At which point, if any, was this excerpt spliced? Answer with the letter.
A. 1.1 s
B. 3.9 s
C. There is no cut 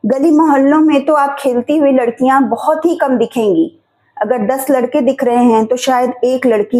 C